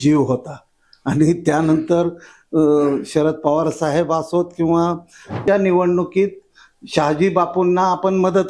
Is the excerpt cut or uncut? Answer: cut